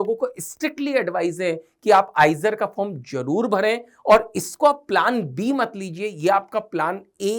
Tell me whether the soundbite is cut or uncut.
uncut